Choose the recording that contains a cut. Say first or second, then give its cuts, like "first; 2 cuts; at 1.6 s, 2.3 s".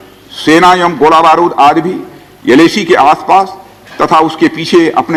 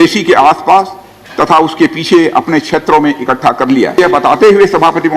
second; 1 cut; at 4.0 s